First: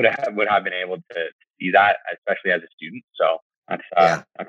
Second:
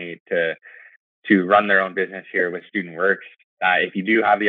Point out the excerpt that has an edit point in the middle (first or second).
first